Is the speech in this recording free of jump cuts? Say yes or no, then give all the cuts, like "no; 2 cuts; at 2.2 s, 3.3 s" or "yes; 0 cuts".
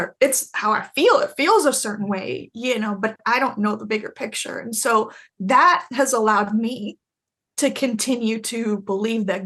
yes; 0 cuts